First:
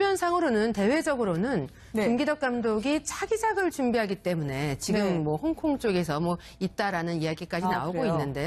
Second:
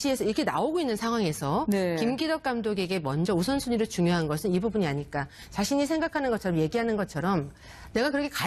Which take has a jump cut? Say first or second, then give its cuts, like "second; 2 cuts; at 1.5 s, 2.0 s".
first; 1 cut; at 6.5 s